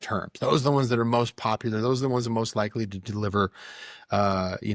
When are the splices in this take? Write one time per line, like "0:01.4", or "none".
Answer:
none